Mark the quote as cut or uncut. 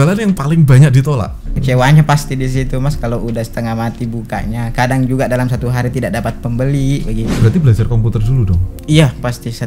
cut